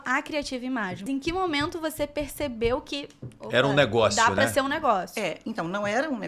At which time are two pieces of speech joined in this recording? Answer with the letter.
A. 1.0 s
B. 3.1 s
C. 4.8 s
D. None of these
A